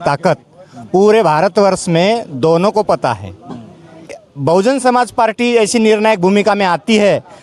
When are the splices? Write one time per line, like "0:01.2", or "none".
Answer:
0:04.1

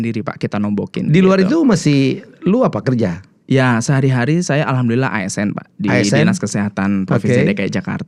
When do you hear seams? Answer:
none

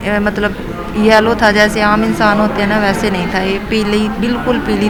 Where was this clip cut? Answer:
none

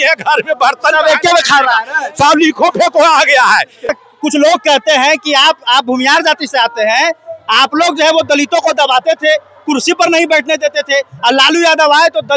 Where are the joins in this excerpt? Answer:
0:03.9

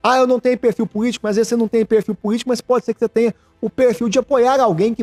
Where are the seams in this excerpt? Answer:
none

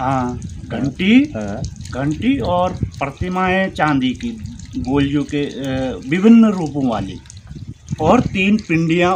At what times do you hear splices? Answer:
none

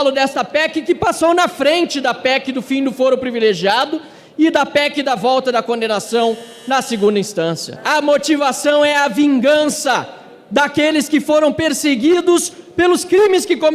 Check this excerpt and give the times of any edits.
0:07.7

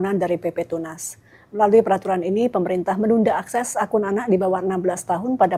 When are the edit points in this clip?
none

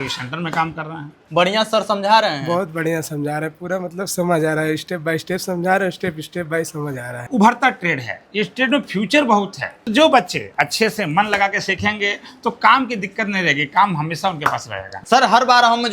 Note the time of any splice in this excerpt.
0:01.2
0:07.2
0:09.7
0:15.0

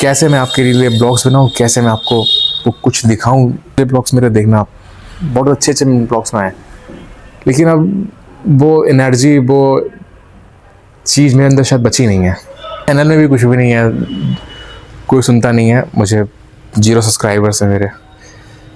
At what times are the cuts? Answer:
0:03.8
0:12.8

